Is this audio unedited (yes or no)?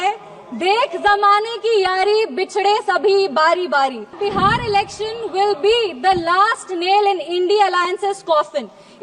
no